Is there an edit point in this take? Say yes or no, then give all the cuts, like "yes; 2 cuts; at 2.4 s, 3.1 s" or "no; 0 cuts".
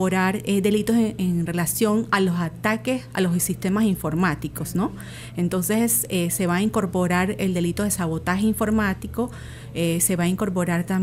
no; 0 cuts